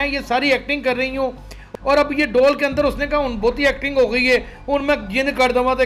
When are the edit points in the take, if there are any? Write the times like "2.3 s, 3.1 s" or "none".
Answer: 1.6 s